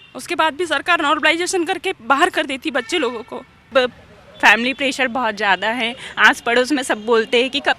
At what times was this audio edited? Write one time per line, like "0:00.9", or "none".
0:03.7